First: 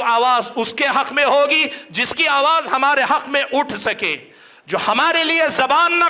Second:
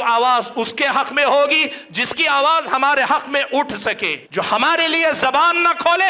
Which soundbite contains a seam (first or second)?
second